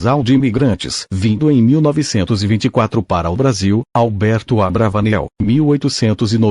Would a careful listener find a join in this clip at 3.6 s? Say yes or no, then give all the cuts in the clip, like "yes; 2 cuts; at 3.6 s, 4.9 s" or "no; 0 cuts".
yes; 1 cut; at 3.6 s